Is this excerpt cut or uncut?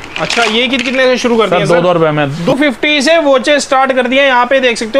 cut